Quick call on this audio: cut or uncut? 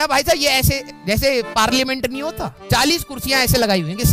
uncut